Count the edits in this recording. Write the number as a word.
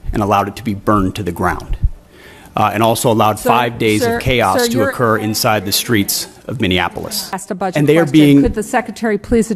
one